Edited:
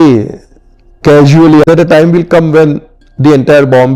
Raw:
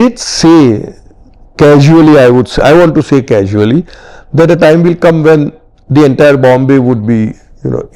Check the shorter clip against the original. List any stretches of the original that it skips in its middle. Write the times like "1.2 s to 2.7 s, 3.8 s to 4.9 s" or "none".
2.2 s to 4.3 s